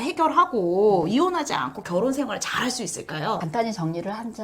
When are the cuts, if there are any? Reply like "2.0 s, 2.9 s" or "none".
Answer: 3.4 s

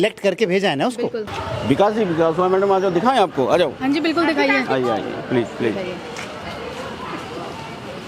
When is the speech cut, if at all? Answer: 1.6 s

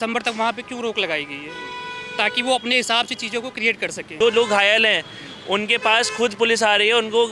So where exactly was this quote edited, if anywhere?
4.1 s

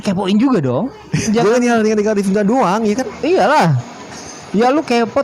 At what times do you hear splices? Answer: 1.3 s

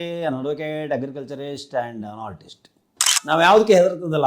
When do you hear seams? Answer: 3.3 s

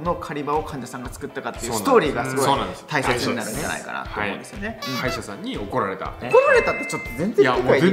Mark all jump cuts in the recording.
4.8 s, 6.2 s

